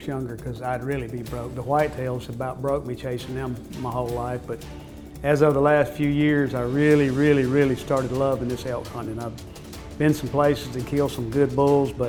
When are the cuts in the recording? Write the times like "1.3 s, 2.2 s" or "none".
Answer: none